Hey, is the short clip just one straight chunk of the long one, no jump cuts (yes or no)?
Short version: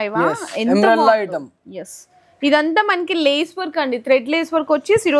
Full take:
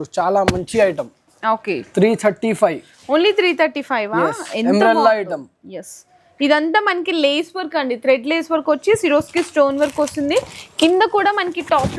yes